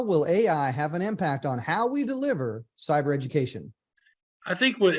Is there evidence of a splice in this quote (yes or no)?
no